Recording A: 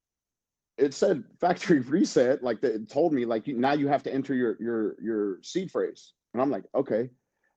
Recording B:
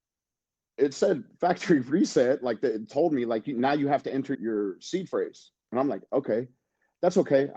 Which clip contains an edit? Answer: B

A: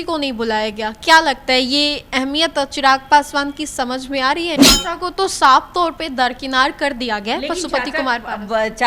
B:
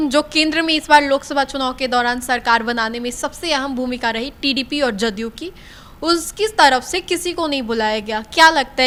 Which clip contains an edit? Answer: A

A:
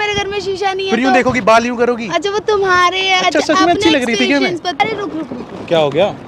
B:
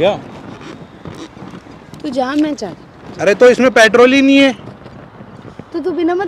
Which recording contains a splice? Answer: A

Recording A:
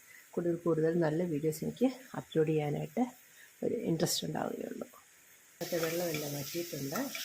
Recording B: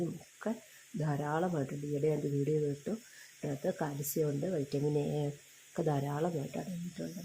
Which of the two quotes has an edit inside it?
A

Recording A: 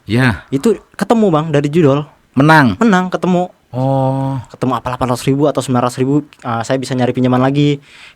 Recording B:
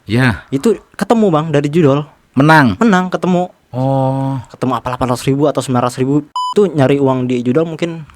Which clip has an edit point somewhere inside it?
B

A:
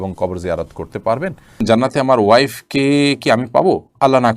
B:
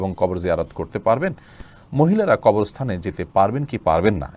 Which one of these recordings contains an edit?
A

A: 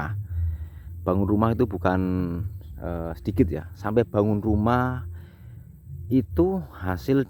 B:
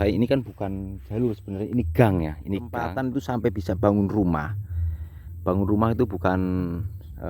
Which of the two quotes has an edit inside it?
B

